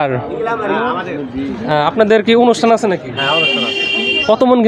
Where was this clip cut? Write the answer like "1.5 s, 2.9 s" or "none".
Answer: none